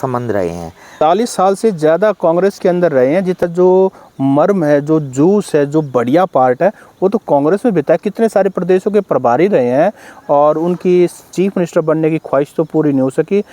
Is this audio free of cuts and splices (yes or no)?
no